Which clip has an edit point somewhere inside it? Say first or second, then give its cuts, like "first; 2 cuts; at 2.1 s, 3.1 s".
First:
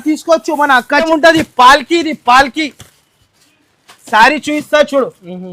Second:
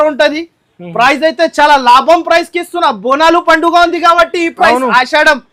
first; 1 cut; at 1.1 s